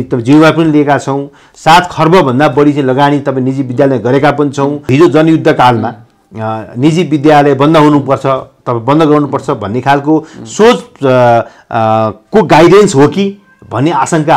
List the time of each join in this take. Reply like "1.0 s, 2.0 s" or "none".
4.9 s